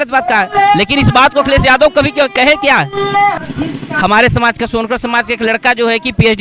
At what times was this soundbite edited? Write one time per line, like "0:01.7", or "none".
0:03.4